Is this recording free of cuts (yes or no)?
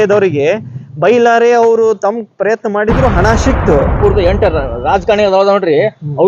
no